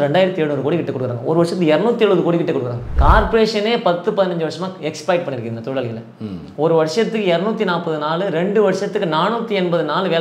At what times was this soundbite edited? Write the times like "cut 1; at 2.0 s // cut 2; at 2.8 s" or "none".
cut 1; at 2.9 s